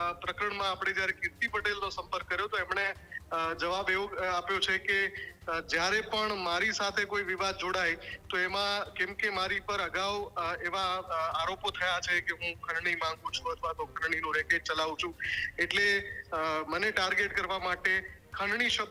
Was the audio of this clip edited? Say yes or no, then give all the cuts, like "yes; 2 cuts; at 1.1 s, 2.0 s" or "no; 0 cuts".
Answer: no; 0 cuts